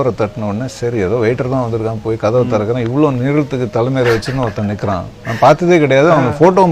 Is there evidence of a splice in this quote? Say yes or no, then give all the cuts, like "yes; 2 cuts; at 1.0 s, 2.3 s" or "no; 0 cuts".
no; 0 cuts